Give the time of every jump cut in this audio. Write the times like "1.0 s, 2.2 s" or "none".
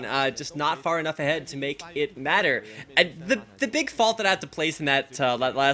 1.4 s